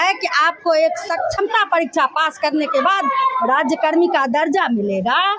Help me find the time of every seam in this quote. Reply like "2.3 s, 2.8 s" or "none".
none